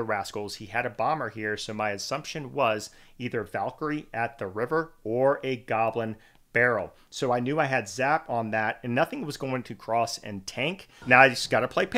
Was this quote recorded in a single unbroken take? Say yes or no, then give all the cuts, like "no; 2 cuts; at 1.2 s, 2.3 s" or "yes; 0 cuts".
no; 1 cut; at 10.9 s